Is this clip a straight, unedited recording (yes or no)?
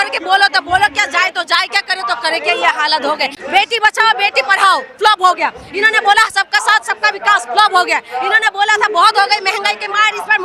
no